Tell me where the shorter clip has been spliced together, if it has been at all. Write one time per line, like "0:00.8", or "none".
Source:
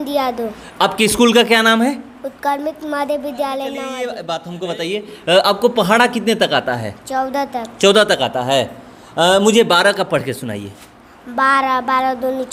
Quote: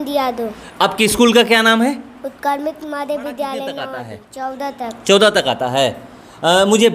0:04.0